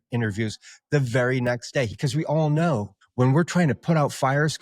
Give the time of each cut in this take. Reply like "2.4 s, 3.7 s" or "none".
1.9 s, 3.0 s

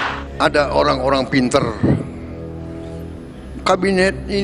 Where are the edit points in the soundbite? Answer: 2.1 s, 3.5 s

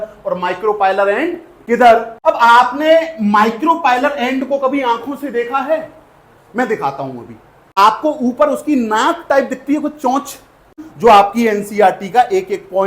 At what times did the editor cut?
2.1 s, 7.8 s, 10.9 s

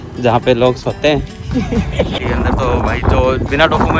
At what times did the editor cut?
2.2 s

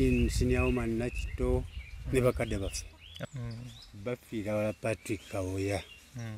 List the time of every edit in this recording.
3.3 s

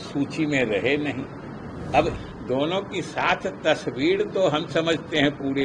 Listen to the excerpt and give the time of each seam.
2.1 s

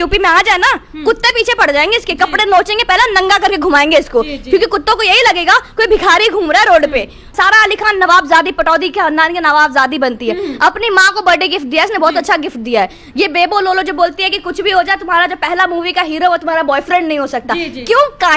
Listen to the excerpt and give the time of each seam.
7.3 s

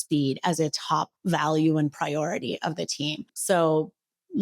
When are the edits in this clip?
3.3 s

